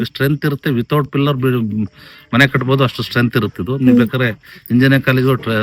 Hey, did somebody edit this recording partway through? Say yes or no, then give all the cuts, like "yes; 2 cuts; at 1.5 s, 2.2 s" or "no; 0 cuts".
no; 0 cuts